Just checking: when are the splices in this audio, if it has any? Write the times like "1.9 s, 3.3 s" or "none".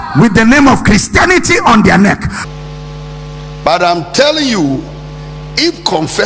2.5 s